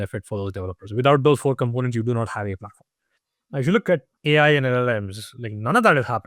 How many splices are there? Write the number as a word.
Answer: two